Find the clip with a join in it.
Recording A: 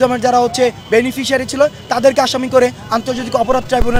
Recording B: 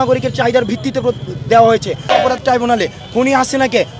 B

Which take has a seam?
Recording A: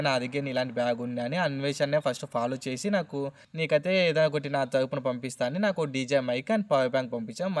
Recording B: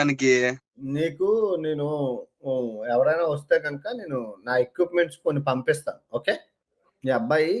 A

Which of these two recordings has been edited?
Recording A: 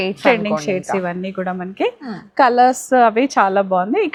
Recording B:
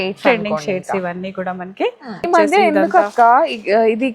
B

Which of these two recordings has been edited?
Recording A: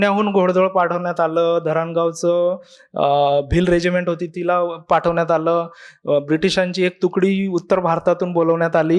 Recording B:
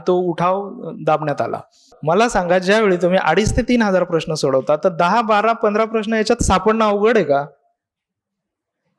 B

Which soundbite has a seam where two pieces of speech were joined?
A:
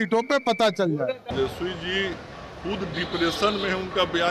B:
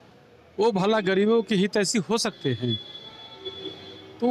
A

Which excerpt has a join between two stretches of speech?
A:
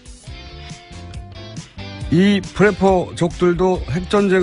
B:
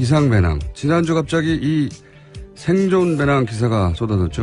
A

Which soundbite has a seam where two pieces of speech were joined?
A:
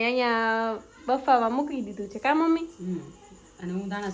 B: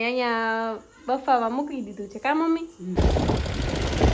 B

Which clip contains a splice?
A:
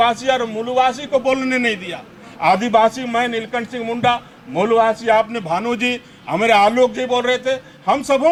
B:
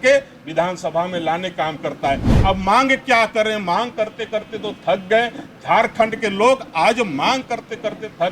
B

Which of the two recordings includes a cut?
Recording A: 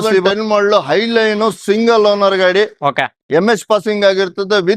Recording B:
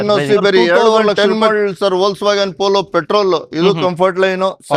B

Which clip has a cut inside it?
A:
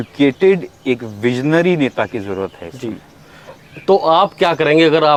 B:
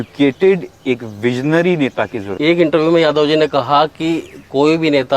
B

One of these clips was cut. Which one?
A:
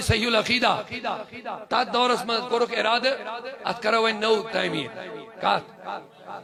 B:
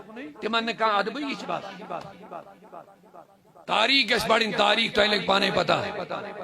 B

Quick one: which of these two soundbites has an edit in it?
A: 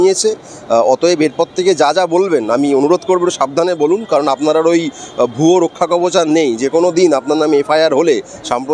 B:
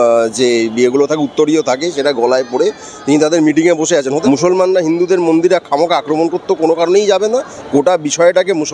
B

